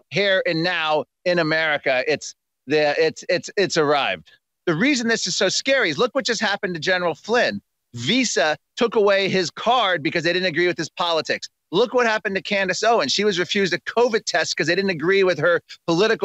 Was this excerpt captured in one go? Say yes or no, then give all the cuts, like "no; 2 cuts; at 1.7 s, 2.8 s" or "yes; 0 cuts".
no; 1 cut; at 4.5 s